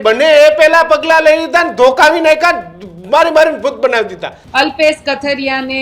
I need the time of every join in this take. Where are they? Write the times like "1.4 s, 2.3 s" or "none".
4.4 s